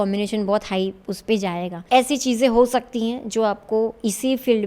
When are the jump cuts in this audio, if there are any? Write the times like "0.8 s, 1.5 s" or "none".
1.8 s